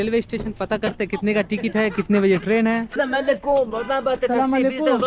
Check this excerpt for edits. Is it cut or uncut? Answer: uncut